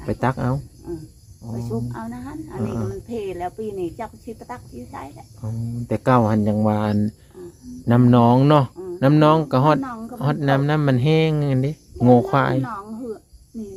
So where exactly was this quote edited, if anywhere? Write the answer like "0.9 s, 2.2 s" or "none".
none